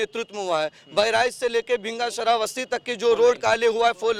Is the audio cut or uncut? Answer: uncut